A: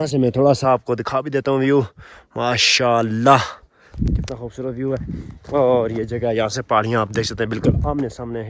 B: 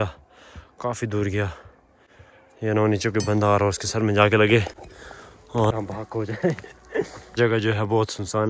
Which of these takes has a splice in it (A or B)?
B